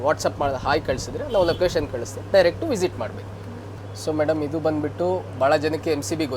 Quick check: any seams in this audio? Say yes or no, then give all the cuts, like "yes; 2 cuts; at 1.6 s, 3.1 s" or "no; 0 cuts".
yes; 1 cut; at 3.6 s